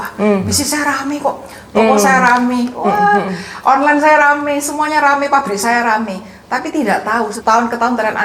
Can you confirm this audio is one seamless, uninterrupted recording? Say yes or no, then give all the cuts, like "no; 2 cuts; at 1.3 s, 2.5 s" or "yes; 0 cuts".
no; 1 cut; at 7.4 s